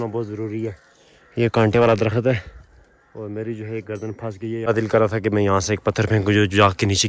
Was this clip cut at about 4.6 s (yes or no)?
yes